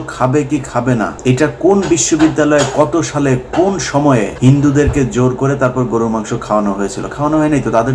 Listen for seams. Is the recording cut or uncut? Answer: cut